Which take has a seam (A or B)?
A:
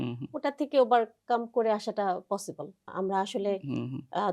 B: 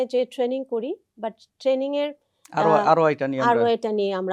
A